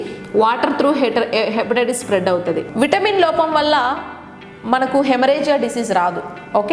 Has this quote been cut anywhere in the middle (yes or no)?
yes